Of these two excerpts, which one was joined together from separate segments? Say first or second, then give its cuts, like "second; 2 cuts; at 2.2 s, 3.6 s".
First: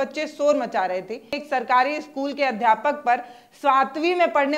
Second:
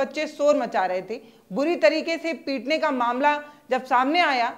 first; 1 cut; at 1.4 s